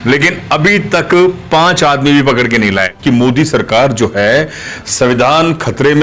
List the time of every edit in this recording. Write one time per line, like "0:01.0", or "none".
0:03.0